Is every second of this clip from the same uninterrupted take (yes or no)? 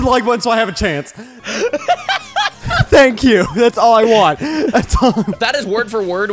no